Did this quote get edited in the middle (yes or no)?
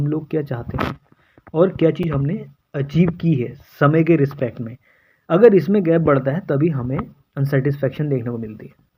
no